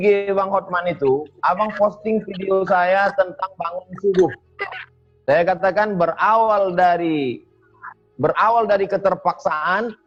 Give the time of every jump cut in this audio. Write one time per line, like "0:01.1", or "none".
none